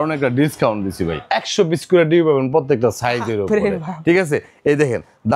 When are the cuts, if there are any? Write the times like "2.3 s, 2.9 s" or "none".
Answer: 1.2 s